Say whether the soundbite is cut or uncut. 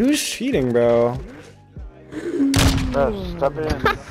uncut